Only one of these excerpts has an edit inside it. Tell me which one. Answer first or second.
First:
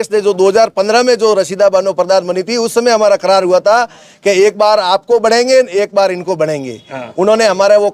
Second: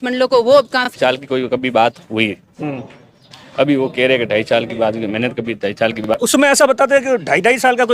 second